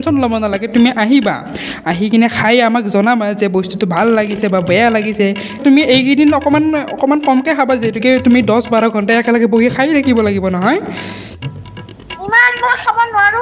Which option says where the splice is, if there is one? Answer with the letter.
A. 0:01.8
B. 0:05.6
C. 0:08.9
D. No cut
B